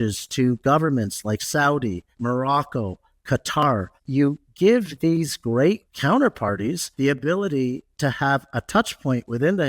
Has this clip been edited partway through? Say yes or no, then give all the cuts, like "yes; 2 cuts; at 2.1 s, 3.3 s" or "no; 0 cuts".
yes; 4 cuts; at 2.1 s, 4.0 s, 5.9 s, 6.9 s